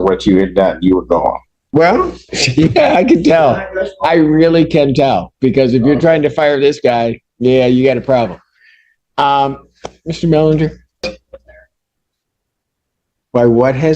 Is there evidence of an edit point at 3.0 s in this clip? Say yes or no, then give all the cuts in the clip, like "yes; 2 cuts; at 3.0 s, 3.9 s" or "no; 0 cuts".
no; 2 cuts; at 1.6 s, 11.0 s